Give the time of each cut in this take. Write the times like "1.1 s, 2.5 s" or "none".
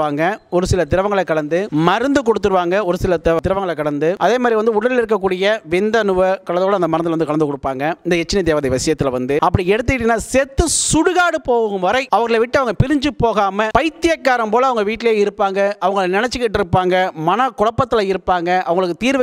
none

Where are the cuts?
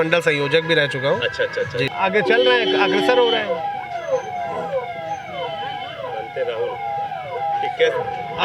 1.9 s

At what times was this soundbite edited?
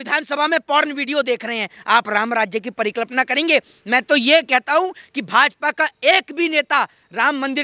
none

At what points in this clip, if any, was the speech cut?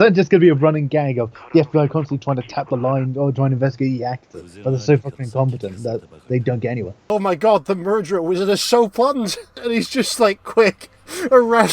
4.8 s, 7.0 s, 9.6 s

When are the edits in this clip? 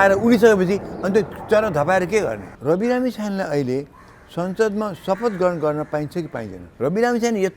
2.5 s, 6.6 s

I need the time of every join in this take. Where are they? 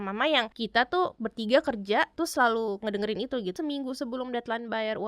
1.0 s, 2.1 s, 3.5 s

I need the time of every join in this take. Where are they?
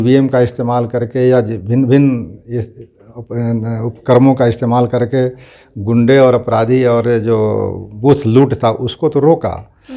none

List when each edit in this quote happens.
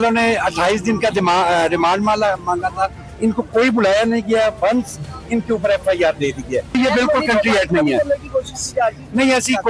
3.0 s, 6.7 s

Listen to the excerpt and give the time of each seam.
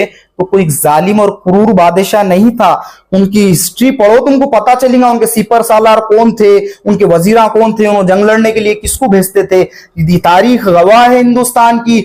none

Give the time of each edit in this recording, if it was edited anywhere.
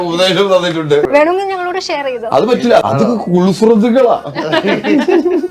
1.1 s, 2.8 s

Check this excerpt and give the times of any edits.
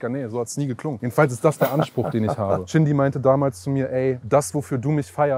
1.0 s, 2.7 s, 4.2 s

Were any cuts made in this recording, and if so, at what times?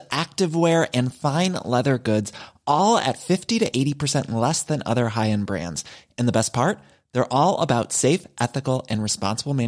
none

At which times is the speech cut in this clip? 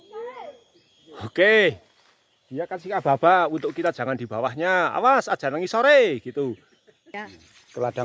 7.0 s

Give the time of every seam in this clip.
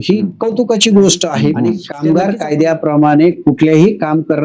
2.0 s

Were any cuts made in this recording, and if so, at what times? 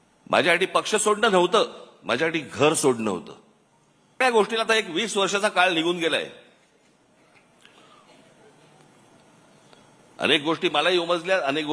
4.2 s

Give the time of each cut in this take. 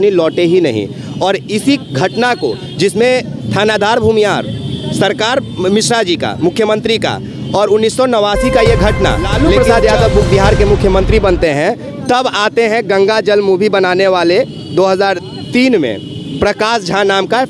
9.4 s

